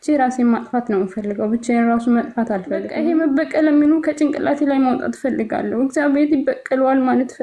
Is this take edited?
yes; 1 cut; at 2.9 s

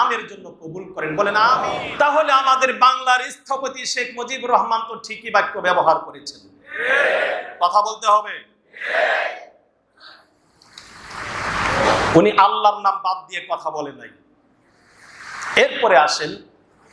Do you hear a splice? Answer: yes; 1 cut; at 1.8 s

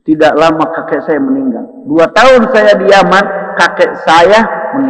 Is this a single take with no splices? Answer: yes; 0 cuts

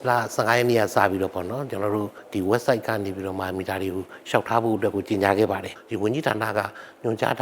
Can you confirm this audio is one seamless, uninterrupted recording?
no; 2 cuts; at 2.2 s, 5.8 s

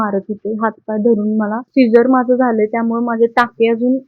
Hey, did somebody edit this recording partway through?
yes; 1 cut; at 1.6 s

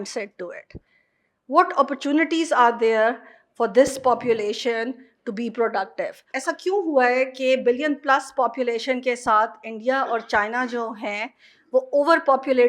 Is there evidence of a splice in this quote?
yes; 1 cut; at 6.5 s

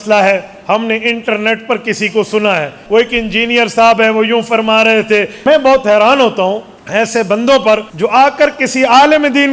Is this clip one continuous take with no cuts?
no; 4 cuts; at 2.8 s, 5.3 s, 6.7 s, 7.9 s

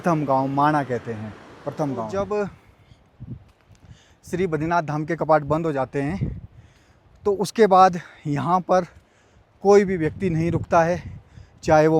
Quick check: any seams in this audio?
yes; 1 cut; at 2.1 s

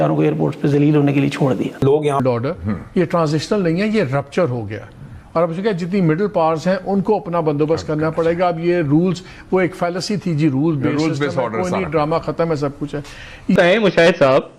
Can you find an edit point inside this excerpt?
yes; 2 cuts; at 2.2 s, 13.6 s

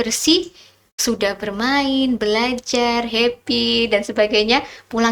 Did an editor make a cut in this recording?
no; 0 cuts

